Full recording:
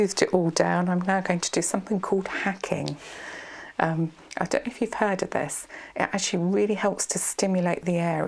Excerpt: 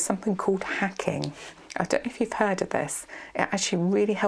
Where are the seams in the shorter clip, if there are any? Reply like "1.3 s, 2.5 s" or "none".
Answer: 1.6 s